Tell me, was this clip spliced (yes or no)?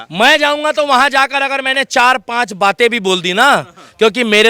no